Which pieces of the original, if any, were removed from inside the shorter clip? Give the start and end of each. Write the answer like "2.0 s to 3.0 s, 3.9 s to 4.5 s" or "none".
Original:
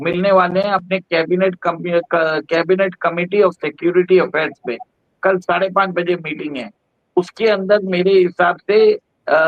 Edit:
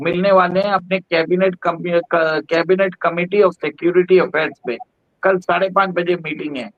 none